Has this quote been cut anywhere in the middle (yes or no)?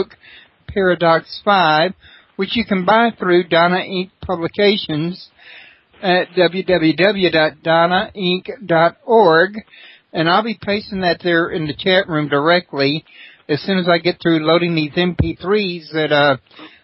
no